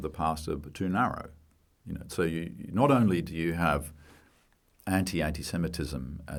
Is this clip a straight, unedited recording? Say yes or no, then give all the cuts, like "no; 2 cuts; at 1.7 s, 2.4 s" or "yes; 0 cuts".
yes; 0 cuts